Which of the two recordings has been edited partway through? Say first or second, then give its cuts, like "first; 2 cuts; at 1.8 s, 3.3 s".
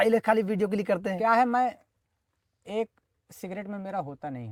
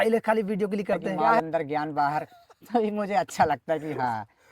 second; 1 cut; at 1.4 s